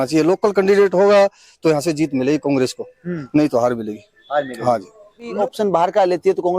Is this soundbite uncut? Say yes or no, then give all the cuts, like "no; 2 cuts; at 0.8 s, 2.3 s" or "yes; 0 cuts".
no; 1 cut; at 5.3 s